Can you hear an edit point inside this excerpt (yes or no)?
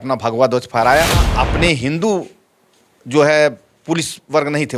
yes